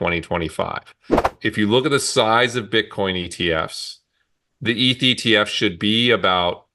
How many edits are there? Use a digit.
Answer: 1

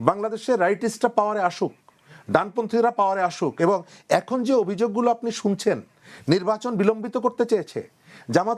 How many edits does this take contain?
0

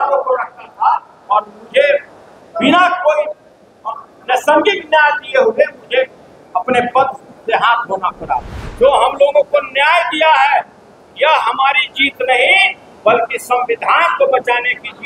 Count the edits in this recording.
1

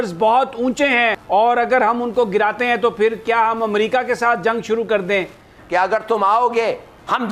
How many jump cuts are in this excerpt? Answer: 2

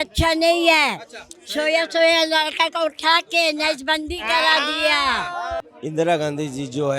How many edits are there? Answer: 1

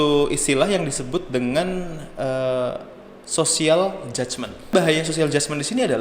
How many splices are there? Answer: 1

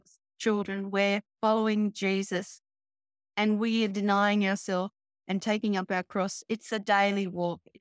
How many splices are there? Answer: 0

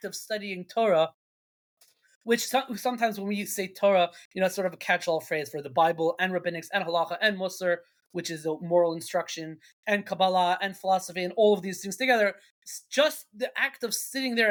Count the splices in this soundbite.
0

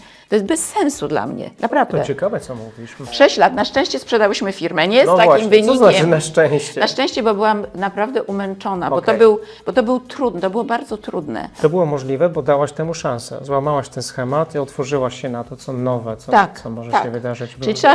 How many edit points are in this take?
2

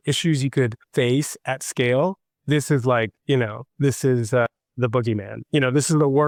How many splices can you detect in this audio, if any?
0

